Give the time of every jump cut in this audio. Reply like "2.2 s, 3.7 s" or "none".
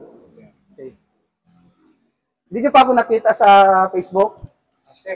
0.9 s